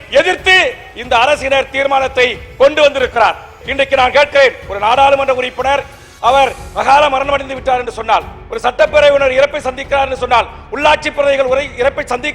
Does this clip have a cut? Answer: yes; 1 cut; at 3.6 s

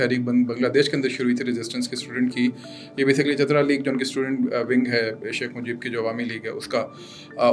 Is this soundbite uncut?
yes; 0 cuts

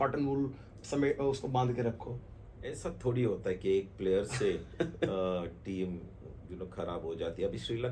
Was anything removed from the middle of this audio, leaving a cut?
no; 0 cuts

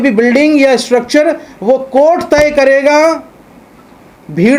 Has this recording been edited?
no; 0 cuts

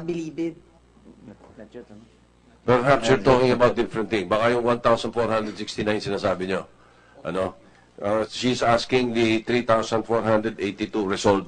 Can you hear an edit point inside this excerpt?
yes; 1 cut; at 8.3 s

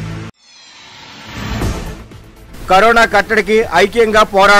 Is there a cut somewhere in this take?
no; 0 cuts

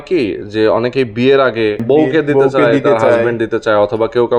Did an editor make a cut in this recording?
yes; 1 cut; at 1.8 s

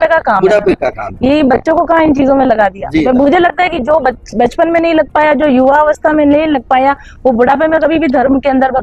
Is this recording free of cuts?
yes; 0 cuts

